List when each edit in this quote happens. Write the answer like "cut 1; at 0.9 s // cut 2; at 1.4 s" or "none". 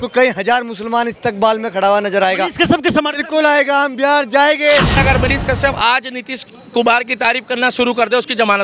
cut 1; at 5.0 s